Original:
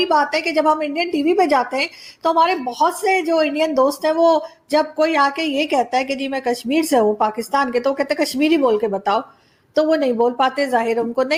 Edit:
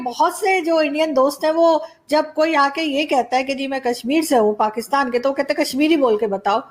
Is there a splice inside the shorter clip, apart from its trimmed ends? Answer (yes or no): no